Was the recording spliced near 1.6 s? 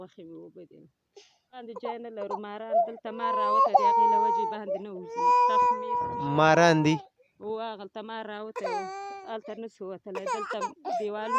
yes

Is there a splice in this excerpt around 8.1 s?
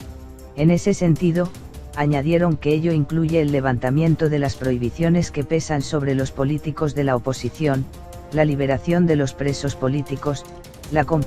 yes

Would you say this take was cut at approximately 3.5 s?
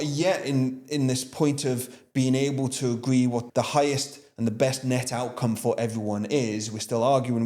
yes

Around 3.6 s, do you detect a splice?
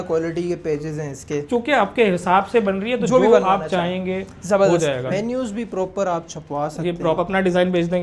no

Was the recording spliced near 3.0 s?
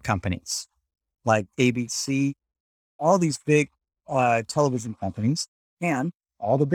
yes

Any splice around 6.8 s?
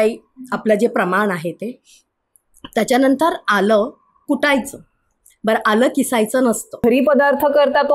yes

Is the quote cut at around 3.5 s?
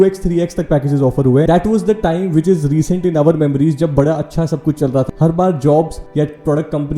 no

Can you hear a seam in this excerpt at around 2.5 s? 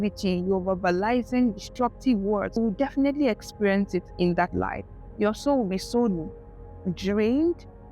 yes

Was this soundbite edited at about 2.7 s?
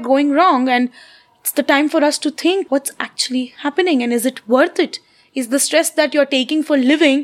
yes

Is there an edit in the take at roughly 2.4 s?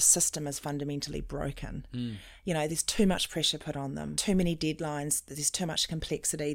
no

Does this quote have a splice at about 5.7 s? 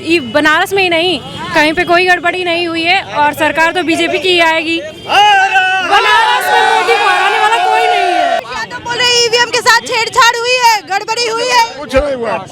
no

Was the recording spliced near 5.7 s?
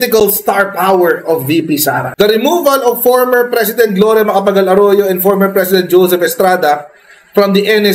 no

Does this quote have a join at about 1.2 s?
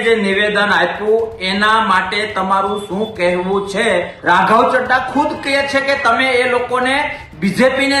no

